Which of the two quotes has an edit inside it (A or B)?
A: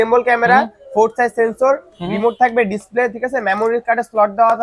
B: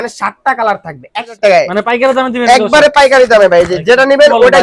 B